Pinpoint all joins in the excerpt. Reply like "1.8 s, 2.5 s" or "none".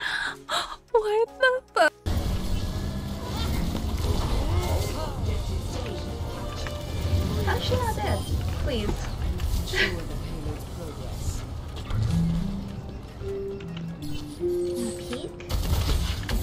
2.0 s

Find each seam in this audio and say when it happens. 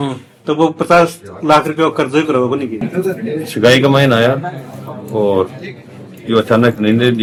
none

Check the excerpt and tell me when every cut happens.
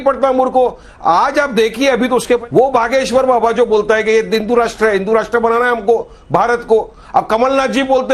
2.4 s

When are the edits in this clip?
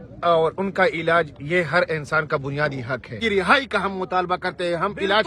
3.2 s

